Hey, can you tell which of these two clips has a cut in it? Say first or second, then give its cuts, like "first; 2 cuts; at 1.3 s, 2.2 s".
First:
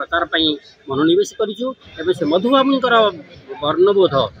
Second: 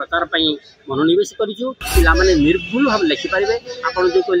second; 1 cut; at 1.8 s